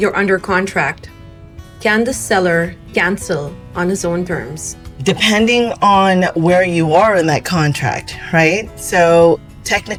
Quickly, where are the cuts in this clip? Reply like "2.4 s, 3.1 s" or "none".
none